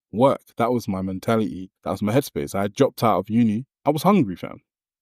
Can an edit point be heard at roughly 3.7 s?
yes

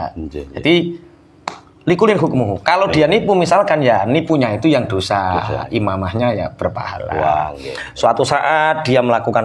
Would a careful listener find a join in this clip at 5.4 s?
no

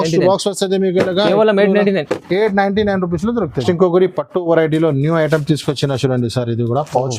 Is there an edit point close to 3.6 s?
yes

